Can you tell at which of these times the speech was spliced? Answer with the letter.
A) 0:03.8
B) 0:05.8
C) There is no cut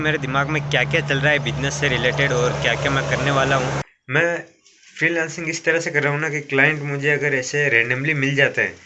A